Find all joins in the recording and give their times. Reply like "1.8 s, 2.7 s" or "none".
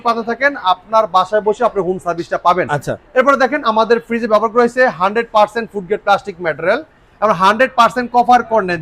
none

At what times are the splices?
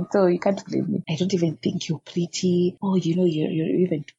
1.1 s, 2.8 s

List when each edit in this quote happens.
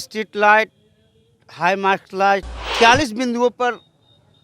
2.6 s

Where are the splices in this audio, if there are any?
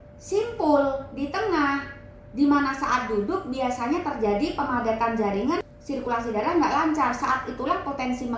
5.7 s

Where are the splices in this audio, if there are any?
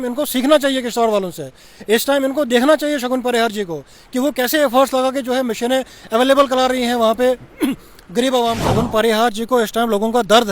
8.6 s

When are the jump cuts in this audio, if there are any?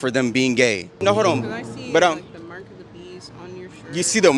0.9 s

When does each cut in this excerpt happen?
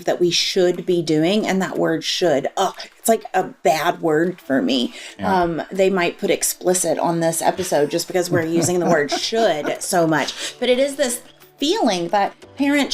3.5 s

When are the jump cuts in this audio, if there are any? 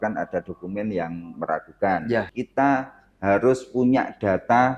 2.3 s

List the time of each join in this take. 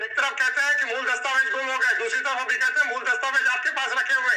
none

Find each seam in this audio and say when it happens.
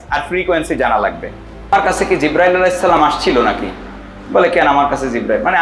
1.7 s

